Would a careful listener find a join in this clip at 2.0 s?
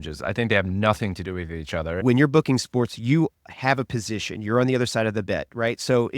yes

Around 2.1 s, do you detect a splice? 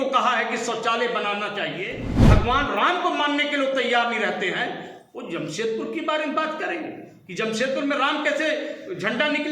yes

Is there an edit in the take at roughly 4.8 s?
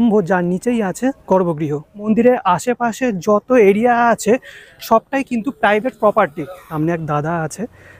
no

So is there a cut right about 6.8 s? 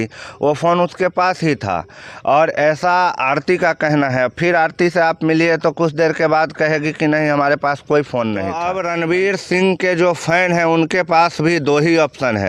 no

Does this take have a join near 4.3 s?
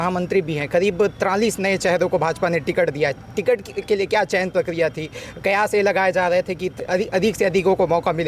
no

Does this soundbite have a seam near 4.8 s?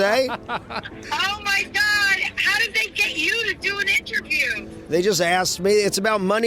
yes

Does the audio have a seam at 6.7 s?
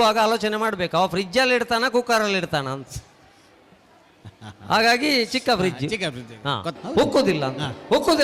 yes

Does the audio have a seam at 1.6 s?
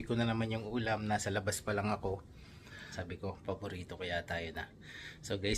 no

